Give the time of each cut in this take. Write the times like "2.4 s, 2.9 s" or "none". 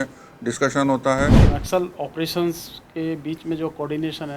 1.5 s